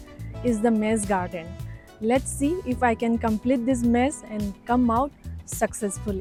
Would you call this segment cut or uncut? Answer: uncut